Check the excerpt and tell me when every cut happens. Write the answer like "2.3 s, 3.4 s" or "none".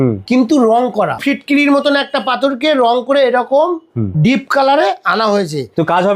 1.2 s